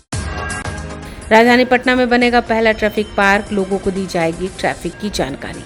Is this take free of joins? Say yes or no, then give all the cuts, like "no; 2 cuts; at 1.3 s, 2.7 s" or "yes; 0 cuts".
yes; 0 cuts